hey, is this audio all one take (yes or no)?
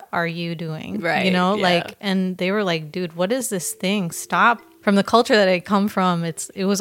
no